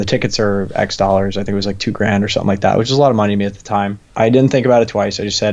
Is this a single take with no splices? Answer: no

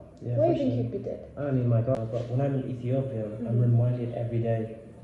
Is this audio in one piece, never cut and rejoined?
no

